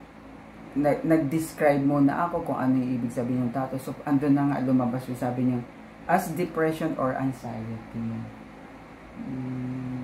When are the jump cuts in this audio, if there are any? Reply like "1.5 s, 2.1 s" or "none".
none

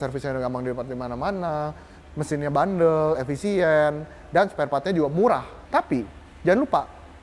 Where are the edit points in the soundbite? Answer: 5.5 s

